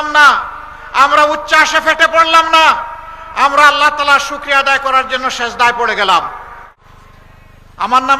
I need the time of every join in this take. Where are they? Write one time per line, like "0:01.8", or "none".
0:06.9